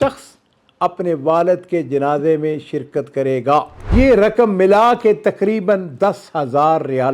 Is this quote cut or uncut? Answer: cut